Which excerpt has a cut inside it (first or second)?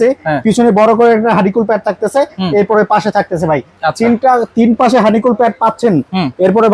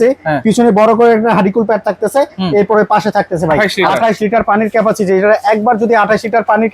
second